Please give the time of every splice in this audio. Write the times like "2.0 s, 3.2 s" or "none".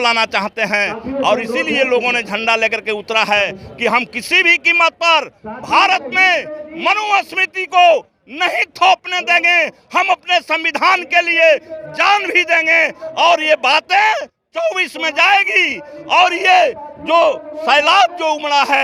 none